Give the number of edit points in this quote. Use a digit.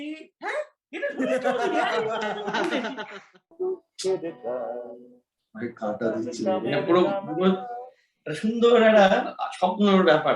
1